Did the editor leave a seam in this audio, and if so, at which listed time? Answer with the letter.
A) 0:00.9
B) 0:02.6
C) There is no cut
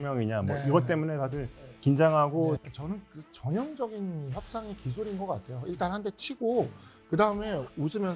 B